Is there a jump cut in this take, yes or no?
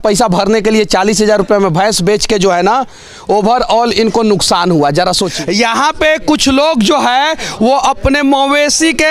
yes